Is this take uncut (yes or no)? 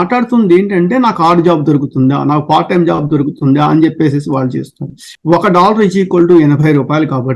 no